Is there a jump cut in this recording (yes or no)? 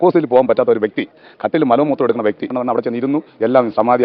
yes